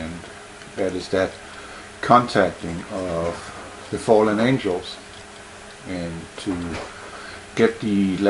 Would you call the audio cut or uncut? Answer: cut